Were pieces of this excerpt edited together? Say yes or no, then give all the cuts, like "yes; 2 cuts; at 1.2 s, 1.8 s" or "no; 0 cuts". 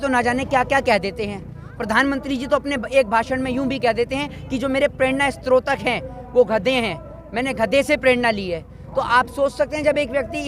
no; 0 cuts